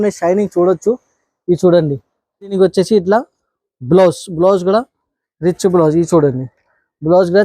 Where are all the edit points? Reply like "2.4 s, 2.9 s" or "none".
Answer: 2.5 s